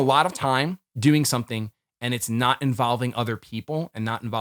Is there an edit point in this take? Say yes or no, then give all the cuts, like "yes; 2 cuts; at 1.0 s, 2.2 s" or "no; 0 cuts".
no; 0 cuts